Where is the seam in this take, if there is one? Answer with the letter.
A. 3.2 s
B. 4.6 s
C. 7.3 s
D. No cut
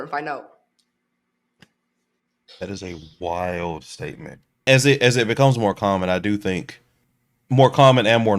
B